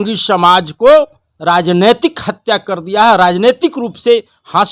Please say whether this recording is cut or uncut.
uncut